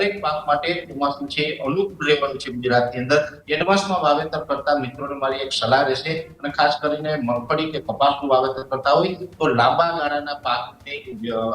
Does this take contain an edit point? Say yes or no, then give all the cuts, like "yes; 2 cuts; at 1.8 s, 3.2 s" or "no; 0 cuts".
yes; 2 cuts; at 3.4 s, 6.3 s